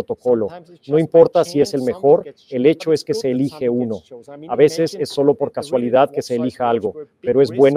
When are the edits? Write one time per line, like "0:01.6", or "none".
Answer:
none